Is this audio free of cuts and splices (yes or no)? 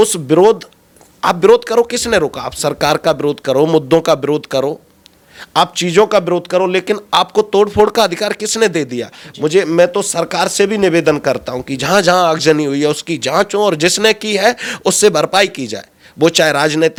yes